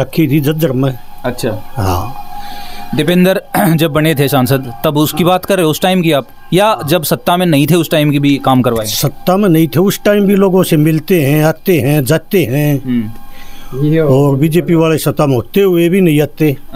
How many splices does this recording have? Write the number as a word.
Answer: zero